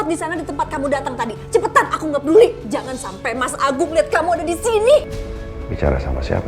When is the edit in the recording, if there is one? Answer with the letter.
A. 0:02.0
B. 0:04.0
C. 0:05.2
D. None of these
C